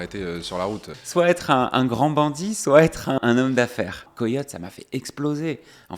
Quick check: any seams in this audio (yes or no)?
yes